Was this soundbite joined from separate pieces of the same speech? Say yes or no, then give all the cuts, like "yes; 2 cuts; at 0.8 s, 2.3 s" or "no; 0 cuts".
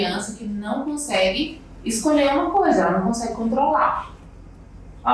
no; 0 cuts